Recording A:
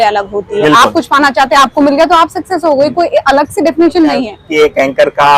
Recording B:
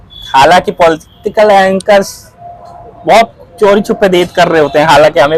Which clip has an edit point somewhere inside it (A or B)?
A